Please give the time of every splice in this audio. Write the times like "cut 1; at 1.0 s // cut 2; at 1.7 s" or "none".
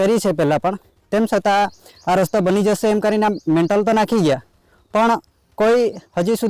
none